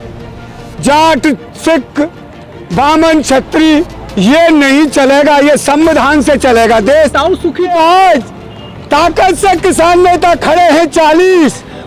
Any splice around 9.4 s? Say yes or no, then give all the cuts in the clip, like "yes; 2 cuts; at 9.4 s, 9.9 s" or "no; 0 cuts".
no; 1 cut; at 7.7 s